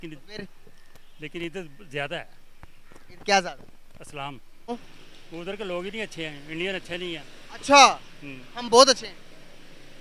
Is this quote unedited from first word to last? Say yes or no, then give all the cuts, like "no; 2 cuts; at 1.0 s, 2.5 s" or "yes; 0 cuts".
no; 1 cut; at 4.7 s